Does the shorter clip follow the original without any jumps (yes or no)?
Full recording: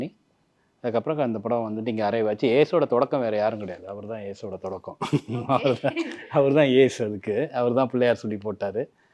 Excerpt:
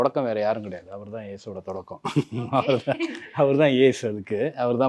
yes